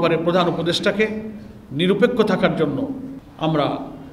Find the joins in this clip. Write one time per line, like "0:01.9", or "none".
0:03.2